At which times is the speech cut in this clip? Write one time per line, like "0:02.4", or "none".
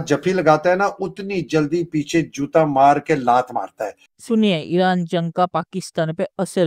none

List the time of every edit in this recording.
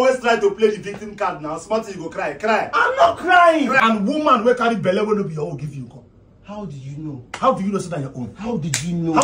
0:03.8

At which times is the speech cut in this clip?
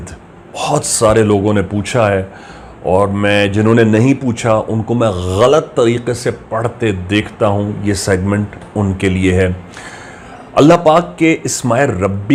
none

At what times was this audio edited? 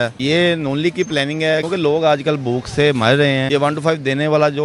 0:01.6
0:03.4

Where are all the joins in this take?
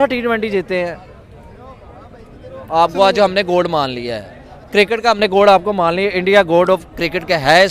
none

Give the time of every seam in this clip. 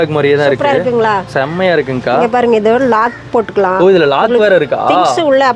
none

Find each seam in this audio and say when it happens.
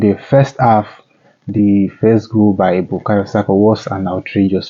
none

